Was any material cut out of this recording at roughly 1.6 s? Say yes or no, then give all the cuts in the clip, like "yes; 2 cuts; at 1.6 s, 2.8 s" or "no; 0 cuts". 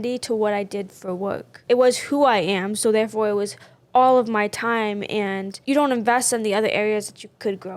yes; 2 cuts; at 1.6 s, 5.5 s